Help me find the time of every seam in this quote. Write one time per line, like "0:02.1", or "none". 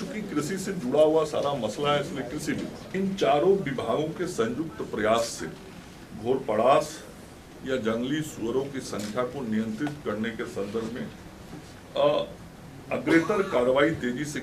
0:02.8